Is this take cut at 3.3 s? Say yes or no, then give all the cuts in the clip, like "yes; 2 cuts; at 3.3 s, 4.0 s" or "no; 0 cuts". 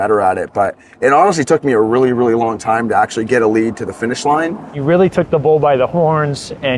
no; 1 cut; at 4.7 s